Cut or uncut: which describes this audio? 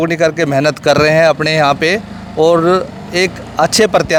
uncut